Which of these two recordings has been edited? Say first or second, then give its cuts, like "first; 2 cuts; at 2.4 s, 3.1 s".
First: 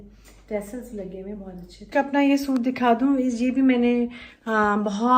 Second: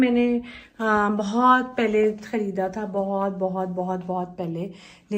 first; 1 cut; at 1.9 s